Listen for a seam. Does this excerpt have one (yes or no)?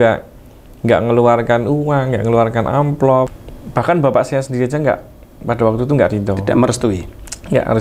yes